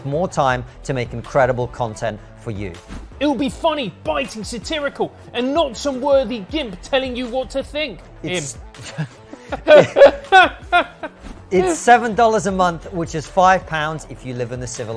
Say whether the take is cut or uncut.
uncut